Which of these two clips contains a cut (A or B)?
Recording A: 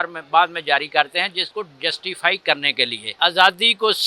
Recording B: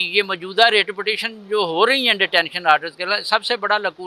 A